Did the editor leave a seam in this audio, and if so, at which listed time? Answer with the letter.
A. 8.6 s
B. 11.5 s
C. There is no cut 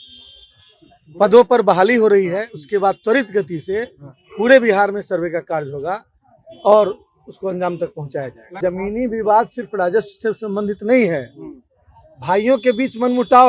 A